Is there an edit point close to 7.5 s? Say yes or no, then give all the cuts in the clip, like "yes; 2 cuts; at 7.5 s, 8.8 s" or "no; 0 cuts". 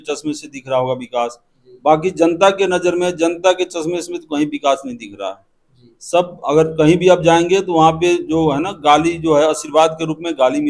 no; 0 cuts